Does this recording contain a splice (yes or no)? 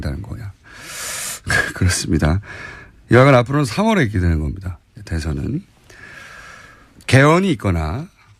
no